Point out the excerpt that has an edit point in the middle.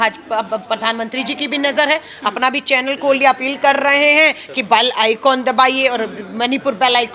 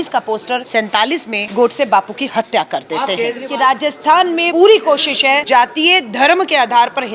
second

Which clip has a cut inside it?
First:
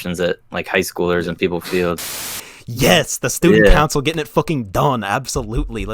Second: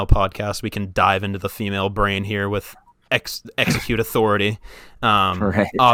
first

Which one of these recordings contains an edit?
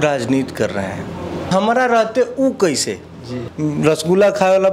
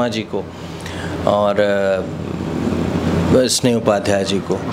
first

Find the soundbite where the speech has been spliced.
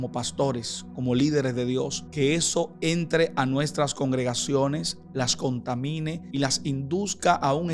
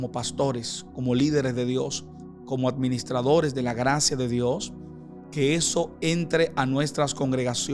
first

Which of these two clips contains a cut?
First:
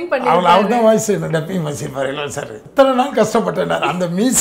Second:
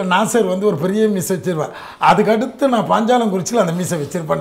first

